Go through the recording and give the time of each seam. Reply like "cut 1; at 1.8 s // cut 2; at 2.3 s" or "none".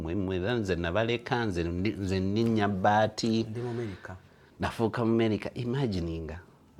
none